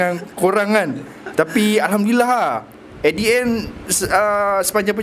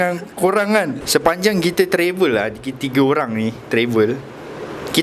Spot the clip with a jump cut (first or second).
second